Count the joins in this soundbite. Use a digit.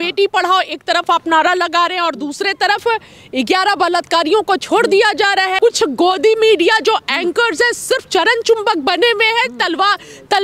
1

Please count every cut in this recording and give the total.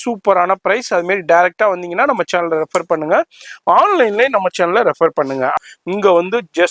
1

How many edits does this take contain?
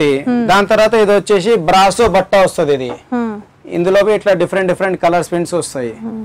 0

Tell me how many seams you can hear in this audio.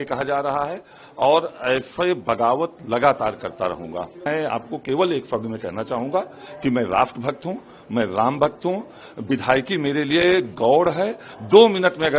1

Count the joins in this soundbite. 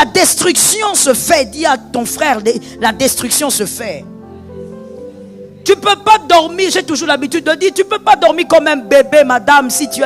0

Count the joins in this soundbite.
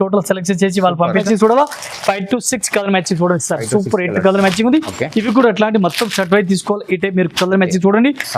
1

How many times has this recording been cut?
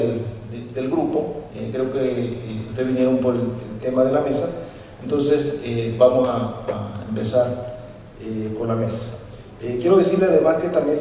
1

